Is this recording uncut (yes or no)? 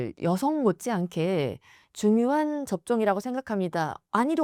yes